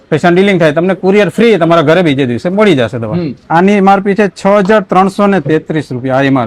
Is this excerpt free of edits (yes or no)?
no